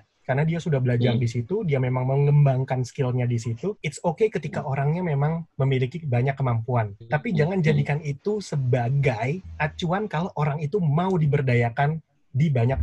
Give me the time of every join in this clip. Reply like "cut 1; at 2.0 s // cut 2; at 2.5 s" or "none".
cut 1; at 3.9 s // cut 2; at 7.0 s